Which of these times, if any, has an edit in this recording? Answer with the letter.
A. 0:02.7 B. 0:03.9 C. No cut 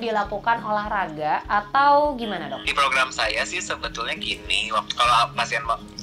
A